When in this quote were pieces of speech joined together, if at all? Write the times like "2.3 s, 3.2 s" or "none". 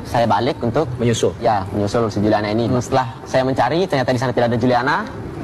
2.7 s

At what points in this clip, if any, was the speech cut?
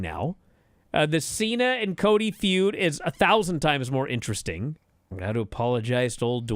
4.9 s

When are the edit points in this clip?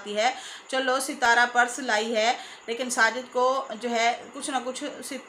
none

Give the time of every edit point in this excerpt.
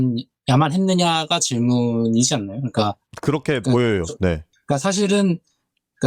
3.1 s, 4.5 s

